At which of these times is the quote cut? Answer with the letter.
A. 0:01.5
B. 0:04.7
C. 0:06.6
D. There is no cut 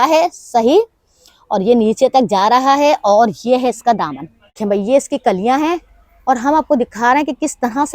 B